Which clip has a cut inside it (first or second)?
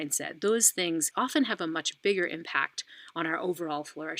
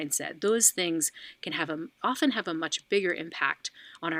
first